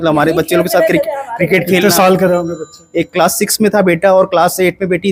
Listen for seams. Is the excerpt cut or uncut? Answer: uncut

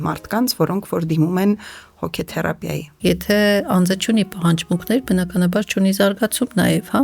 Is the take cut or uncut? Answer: cut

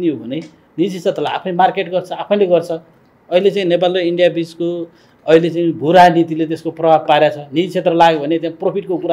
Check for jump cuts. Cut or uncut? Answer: uncut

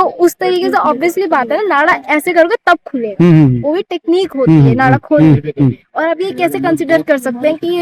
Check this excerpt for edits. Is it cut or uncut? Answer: uncut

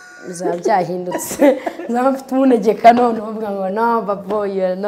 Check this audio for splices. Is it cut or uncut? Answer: uncut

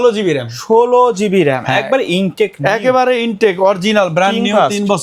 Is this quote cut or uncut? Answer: uncut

